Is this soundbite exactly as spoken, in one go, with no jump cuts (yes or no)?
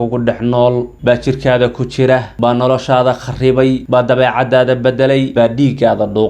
no